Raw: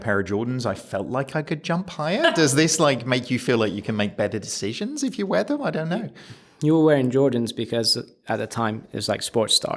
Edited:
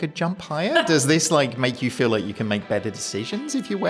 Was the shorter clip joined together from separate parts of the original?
no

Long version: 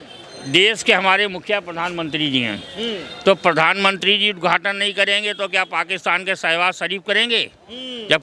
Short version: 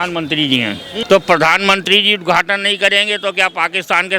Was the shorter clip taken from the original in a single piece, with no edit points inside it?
no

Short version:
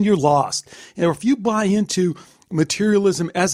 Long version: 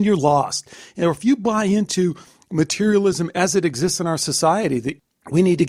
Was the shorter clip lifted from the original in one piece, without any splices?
yes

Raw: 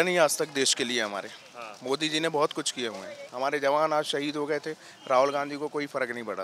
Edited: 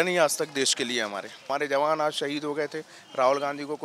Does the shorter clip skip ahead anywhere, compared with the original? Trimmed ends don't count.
yes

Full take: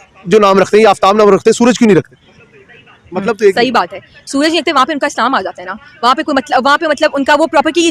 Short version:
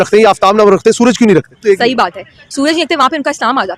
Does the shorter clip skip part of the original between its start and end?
yes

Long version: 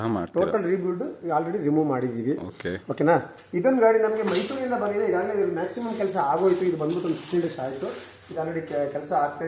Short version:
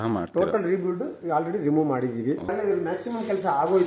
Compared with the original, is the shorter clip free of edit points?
no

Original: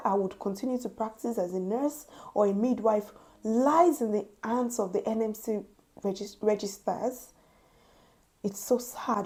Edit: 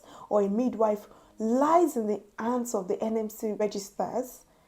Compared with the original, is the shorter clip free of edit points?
no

